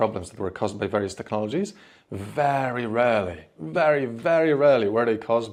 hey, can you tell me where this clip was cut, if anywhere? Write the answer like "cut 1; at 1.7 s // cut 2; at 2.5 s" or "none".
none